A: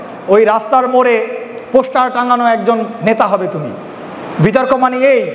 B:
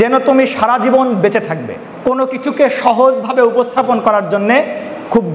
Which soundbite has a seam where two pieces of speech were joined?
B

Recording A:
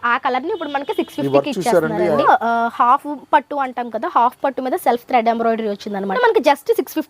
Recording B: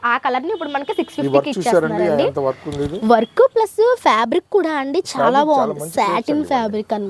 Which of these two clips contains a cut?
A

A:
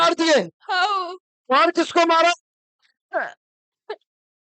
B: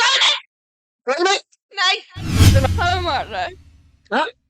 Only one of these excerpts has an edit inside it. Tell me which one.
B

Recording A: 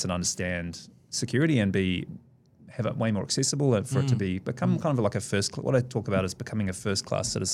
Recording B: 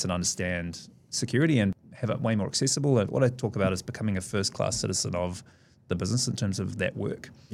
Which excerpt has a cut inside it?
B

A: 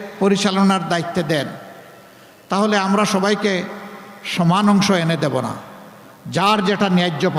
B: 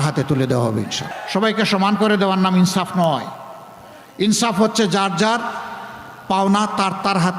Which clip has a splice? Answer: B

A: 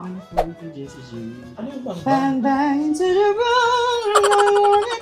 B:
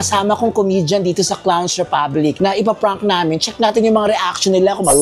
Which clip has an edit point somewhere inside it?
B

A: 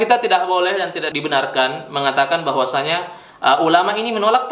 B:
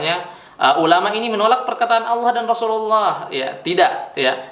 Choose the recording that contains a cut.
A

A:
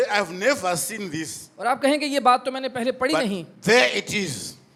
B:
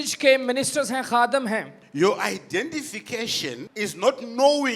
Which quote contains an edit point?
B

